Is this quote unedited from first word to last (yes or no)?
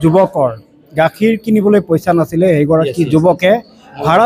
yes